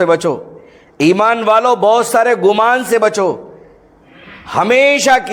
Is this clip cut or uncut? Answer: uncut